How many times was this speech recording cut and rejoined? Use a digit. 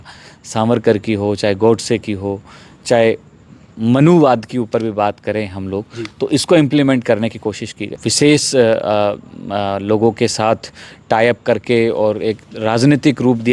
1